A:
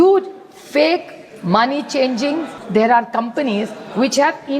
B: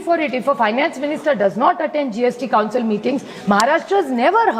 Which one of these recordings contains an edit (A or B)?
A